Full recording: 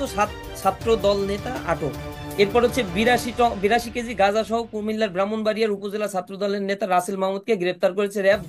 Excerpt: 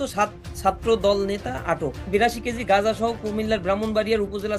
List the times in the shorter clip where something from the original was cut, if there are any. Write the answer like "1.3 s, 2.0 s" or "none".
2.1 s